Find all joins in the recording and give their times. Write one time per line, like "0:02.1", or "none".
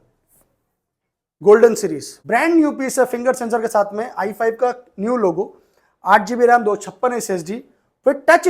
0:02.1